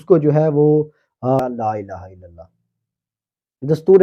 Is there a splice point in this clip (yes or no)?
yes